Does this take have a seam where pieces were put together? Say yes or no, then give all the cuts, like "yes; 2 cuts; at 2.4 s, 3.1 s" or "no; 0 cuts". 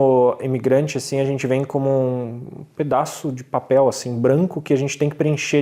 no; 0 cuts